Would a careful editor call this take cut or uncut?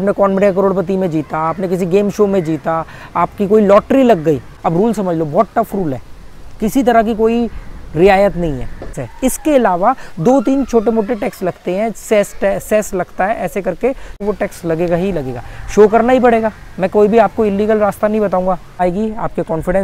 cut